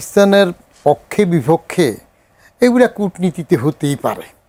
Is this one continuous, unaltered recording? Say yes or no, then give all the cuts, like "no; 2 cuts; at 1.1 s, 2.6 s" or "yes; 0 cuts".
yes; 0 cuts